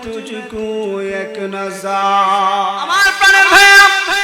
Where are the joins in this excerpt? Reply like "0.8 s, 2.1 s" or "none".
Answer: 3.1 s